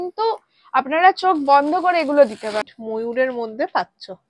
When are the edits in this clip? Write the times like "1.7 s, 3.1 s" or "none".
2.7 s